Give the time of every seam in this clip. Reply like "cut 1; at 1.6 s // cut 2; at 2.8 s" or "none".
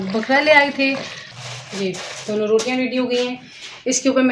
cut 1; at 1.2 s